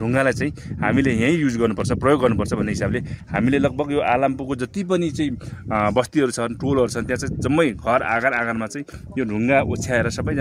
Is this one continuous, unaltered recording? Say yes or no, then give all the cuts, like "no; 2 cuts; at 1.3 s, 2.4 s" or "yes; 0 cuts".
yes; 0 cuts